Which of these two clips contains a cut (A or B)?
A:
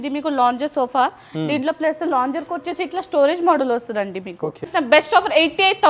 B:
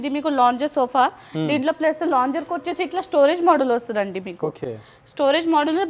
A